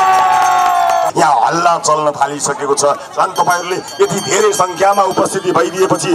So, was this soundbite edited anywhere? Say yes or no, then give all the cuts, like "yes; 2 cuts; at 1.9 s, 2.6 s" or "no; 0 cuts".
yes; 1 cut; at 1.1 s